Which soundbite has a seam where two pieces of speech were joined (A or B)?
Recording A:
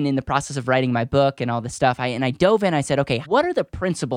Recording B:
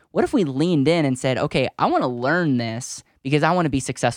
A